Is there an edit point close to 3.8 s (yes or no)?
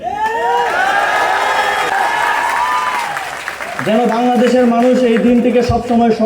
no